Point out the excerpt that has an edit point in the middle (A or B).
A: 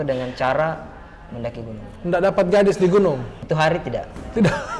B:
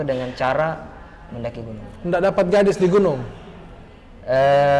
A